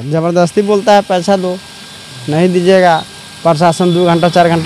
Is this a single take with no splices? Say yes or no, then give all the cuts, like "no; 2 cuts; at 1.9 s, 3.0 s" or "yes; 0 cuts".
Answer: yes; 0 cuts